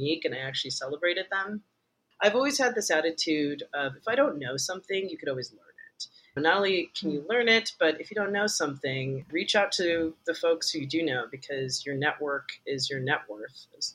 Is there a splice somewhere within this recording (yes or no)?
yes